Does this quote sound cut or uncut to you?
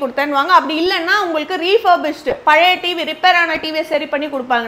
uncut